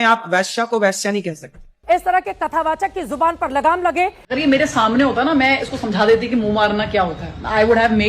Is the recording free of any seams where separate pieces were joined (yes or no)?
no